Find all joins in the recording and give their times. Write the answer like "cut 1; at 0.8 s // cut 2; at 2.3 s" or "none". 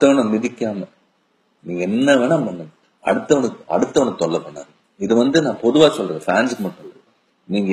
cut 1; at 5.4 s